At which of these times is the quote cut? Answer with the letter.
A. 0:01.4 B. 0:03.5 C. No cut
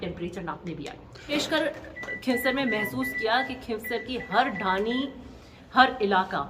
A